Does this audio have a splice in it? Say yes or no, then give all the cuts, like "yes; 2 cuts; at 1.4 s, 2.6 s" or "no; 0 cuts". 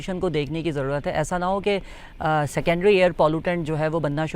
no; 0 cuts